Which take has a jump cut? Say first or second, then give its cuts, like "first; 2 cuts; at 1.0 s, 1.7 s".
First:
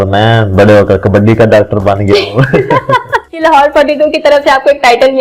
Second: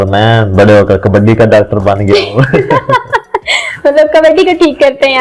first; 1 cut; at 3.2 s